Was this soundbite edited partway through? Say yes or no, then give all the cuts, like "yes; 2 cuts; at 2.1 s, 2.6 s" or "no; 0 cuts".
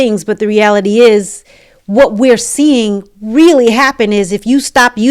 no; 0 cuts